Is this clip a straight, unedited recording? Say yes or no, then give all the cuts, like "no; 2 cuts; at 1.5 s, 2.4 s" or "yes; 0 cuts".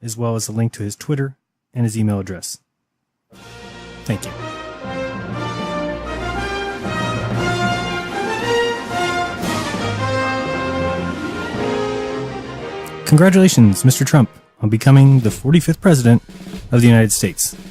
no; 1 cut; at 1.1 s